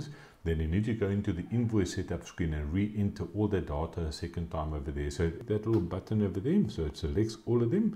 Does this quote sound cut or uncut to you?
cut